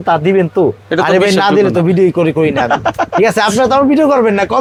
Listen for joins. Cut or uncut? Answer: uncut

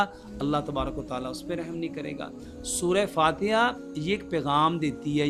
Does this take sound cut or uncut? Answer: uncut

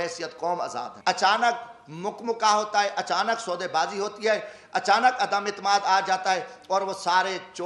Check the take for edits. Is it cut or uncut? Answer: cut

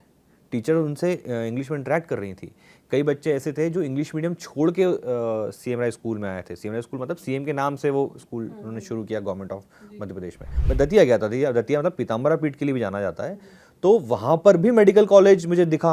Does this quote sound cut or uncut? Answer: cut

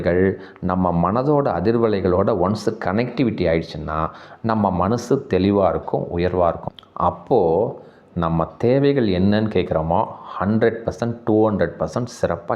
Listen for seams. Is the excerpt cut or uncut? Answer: cut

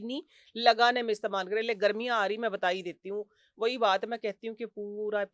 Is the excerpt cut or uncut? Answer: uncut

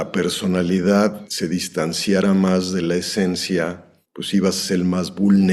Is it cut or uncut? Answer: cut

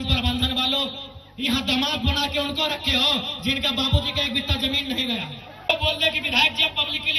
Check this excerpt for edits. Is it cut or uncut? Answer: cut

